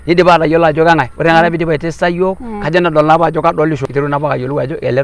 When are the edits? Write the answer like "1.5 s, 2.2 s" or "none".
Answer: 3.9 s